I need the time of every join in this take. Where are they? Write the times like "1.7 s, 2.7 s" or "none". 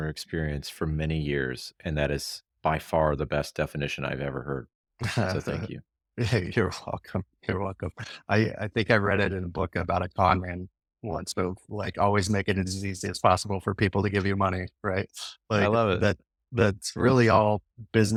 none